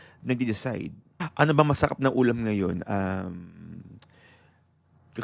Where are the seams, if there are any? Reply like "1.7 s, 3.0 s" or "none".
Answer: 1.3 s